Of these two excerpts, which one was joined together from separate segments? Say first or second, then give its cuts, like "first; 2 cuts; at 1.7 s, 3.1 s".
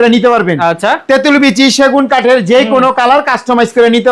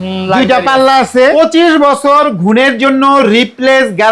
second; 1 cut; at 1.3 s